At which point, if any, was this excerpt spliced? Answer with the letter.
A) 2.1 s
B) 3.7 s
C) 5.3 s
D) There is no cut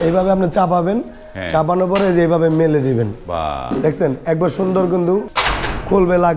C